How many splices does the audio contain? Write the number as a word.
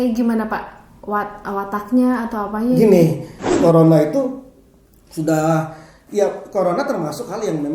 one